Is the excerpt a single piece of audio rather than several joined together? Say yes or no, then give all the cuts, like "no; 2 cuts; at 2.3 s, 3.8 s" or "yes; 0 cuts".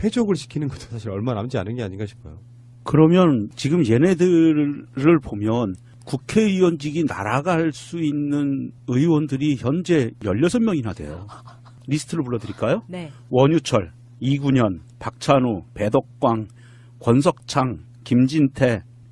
no; 1 cut; at 2.4 s